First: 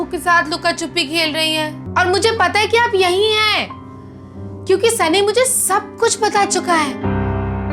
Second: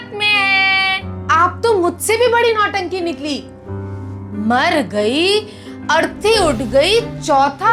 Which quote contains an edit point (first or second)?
first